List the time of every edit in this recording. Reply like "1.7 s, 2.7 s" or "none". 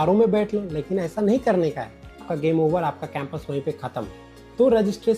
2.3 s, 4.2 s